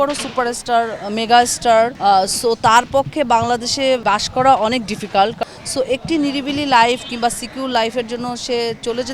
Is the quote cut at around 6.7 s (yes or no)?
no